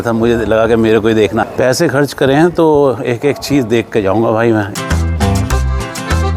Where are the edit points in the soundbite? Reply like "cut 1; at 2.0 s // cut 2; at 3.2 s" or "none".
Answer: cut 1; at 1.5 s // cut 2; at 4.7 s